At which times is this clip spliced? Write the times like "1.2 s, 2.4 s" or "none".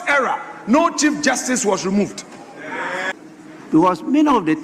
3.1 s